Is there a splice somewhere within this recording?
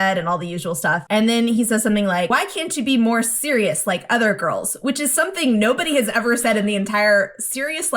yes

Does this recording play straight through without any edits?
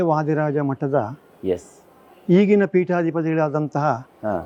yes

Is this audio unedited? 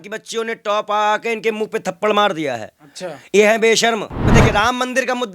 no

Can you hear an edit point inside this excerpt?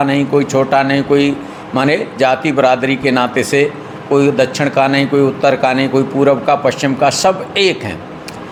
no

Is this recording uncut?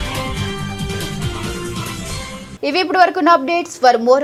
yes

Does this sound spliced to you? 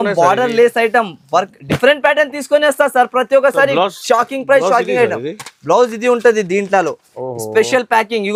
no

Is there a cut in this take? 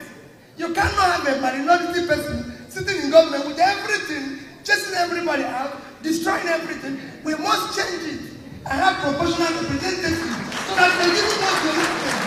no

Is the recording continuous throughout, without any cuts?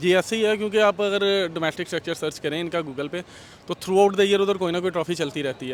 yes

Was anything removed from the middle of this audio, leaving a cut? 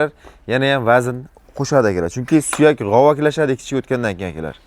no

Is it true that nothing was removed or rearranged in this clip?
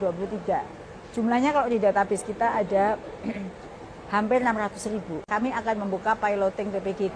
no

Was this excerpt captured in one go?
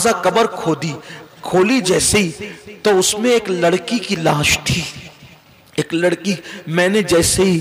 yes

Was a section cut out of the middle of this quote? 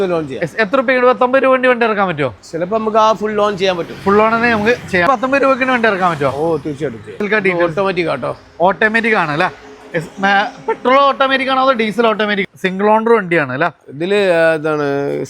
yes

